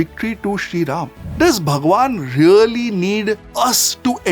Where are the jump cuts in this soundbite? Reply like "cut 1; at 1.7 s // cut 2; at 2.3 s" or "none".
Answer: cut 1; at 1.2 s

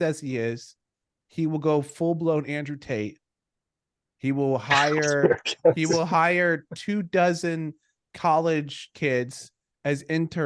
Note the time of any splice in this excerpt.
none

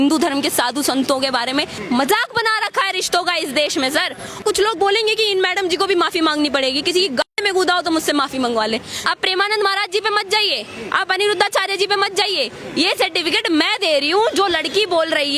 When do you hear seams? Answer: cut 1; at 1.8 s // cut 2; at 4.4 s // cut 3; at 8.9 s

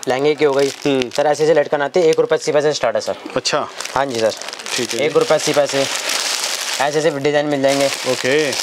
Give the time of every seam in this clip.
none

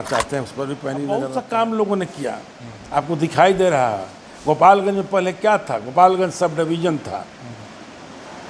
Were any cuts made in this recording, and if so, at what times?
cut 1; at 1.3 s

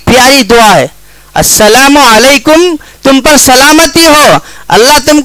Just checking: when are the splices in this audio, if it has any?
none

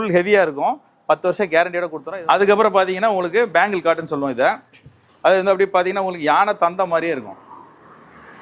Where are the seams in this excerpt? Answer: cut 1; at 2.0 s

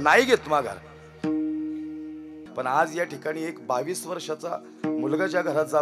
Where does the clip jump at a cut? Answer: cut 1; at 2.4 s

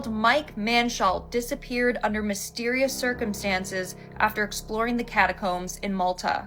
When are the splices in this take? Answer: none

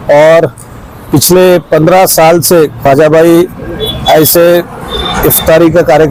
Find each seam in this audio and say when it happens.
none

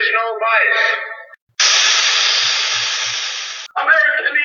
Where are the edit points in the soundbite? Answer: cut 1; at 1.4 s // cut 2; at 3.5 s

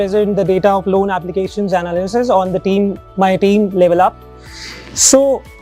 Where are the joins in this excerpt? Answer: none

